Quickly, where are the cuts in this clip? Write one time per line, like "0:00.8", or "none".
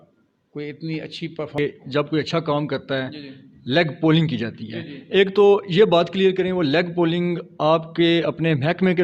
0:01.6